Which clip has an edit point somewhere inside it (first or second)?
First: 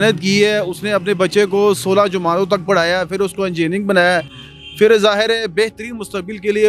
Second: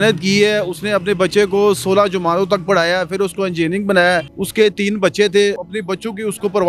second